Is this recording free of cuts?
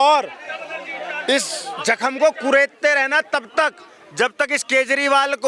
yes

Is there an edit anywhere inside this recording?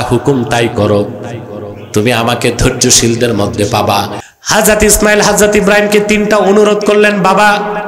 yes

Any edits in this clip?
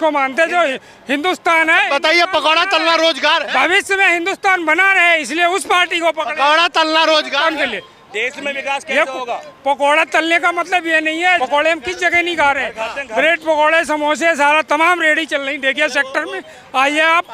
yes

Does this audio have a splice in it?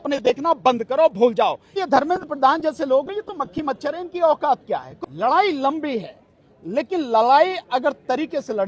yes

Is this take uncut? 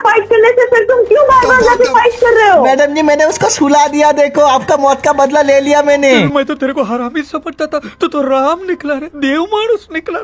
yes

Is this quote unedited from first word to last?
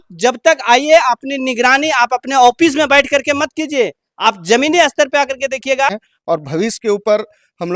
no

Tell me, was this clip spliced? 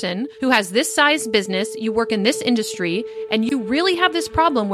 no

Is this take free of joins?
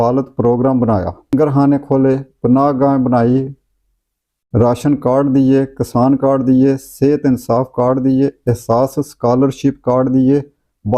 no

